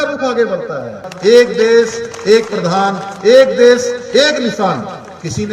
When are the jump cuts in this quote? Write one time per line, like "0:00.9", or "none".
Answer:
0:01.1